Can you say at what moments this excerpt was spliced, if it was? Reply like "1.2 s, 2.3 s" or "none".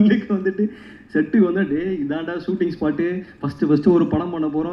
none